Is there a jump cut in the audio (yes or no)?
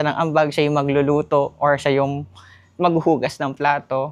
no